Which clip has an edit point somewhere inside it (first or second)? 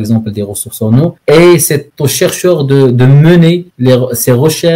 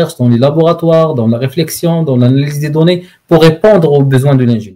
first